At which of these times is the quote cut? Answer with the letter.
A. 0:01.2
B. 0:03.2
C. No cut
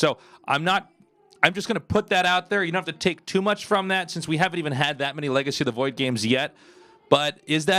B